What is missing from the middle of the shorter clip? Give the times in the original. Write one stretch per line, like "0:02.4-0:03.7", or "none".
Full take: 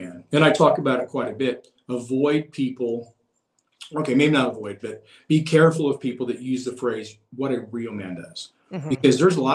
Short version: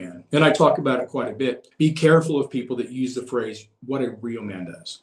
0:01.6-0:05.1